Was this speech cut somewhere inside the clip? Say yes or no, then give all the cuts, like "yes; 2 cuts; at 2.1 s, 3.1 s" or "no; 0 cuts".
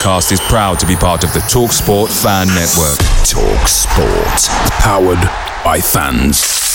no; 0 cuts